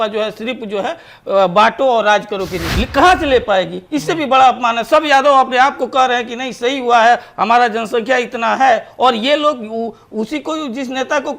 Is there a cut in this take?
yes; 1 cut; at 2.6 s

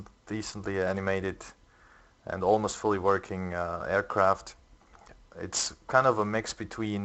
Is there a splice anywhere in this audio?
no; 0 cuts

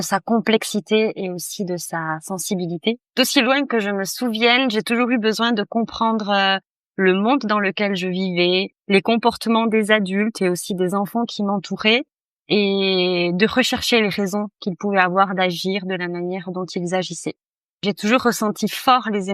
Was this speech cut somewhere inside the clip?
yes; 2 cuts; at 3.1 s, 8.8 s

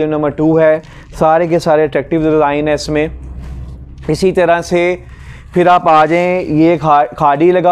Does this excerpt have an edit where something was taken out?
no; 0 cuts

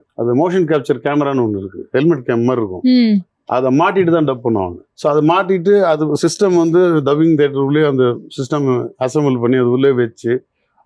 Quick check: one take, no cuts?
yes; 0 cuts

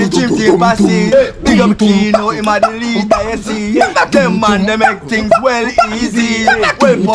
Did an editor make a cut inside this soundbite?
no; 0 cuts

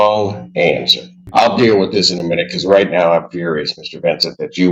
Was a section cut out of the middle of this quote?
yes; 1 cut; at 1.2 s

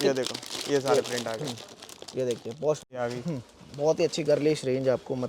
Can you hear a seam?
yes; 1 cut; at 2.9 s

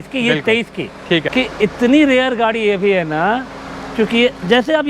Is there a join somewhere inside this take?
yes; 1 cut; at 1.3 s

